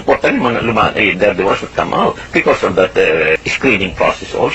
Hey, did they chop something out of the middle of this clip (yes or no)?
yes